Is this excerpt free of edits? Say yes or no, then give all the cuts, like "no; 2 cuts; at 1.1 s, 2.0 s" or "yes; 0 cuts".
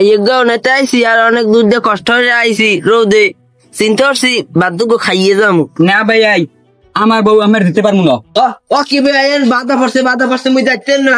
no; 1 cut; at 8.3 s